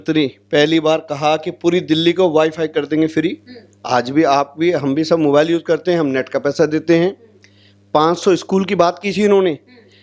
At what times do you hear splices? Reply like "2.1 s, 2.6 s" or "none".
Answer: none